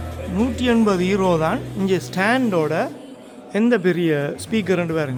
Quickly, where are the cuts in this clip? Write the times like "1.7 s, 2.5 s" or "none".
none